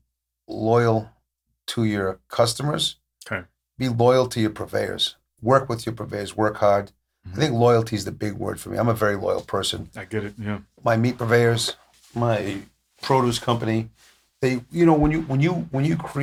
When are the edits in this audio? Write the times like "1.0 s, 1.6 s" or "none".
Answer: none

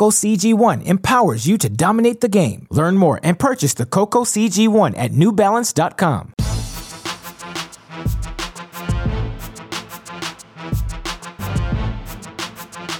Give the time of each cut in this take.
6.3 s

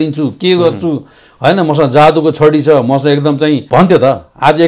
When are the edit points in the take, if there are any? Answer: 3.6 s

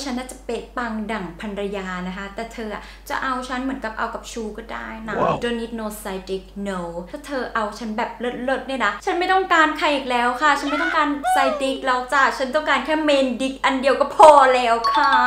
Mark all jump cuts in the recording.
5.4 s, 7.1 s

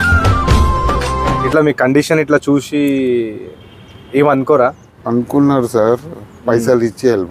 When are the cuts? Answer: 1.4 s, 4.9 s

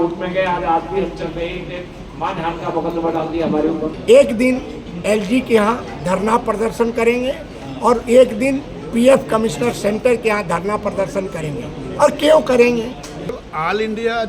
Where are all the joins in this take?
3.9 s, 13.4 s

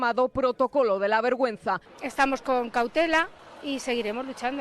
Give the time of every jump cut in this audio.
1.9 s, 3.4 s

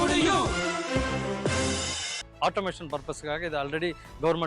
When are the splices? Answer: 2.3 s

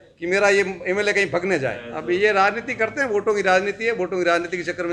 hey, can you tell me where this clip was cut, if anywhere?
1.9 s

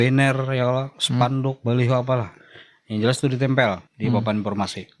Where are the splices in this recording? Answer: 1.0 s, 3.9 s

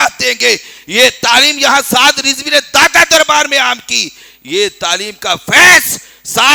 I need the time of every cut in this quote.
none

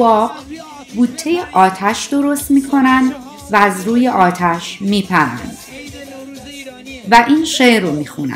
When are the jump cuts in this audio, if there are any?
none

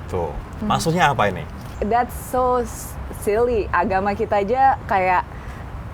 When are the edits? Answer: 1.8 s

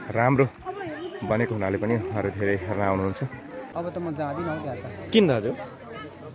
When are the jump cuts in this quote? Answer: 3.7 s

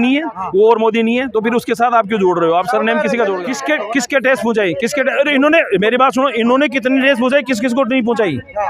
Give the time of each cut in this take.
3.4 s

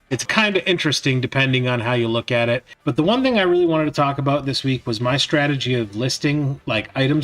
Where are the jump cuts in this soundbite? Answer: 2.7 s

